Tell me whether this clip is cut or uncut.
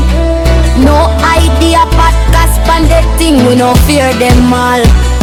uncut